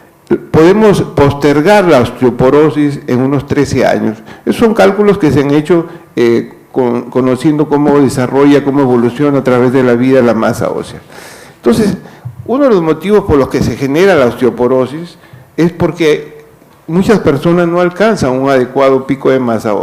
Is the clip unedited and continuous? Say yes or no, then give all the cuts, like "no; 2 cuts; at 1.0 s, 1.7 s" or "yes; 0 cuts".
no; 1 cut; at 12.6 s